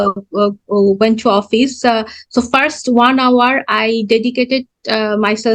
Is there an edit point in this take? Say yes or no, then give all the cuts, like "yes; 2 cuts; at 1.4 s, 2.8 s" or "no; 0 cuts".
no; 0 cuts